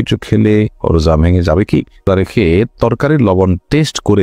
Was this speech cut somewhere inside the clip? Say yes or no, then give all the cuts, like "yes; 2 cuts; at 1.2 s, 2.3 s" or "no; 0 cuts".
yes; 1 cut; at 2.1 s